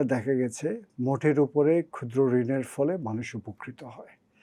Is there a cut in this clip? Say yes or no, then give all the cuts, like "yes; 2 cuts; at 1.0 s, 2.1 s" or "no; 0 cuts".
no; 0 cuts